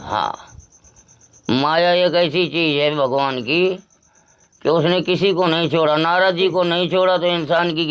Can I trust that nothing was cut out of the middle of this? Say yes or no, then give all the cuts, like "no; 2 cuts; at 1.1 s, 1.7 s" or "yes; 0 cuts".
yes; 0 cuts